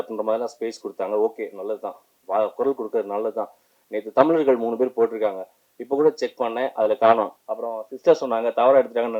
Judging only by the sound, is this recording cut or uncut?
cut